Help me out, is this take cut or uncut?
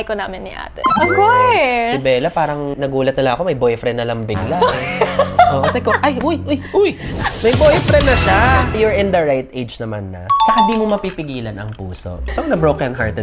cut